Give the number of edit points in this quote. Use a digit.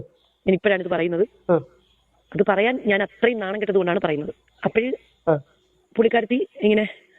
0